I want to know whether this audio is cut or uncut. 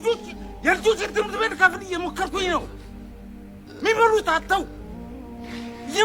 uncut